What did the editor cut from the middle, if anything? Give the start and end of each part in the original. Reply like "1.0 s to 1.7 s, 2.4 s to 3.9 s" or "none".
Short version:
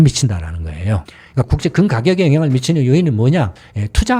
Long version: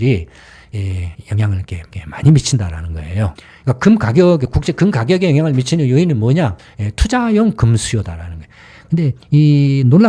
3.7 s to 4.5 s